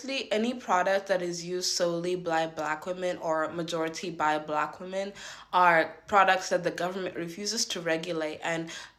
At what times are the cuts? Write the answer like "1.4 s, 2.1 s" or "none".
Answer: none